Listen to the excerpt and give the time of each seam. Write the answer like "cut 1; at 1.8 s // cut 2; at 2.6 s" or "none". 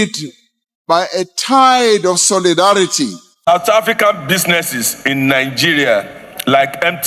cut 1; at 3.4 s